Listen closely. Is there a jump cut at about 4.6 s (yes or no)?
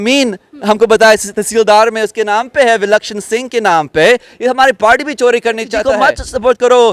no